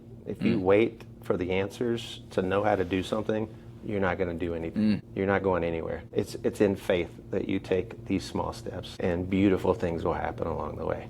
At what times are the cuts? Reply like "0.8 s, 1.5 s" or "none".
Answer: 5.1 s, 6.0 s, 8.9 s

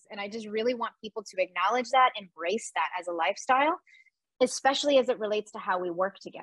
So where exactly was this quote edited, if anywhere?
none

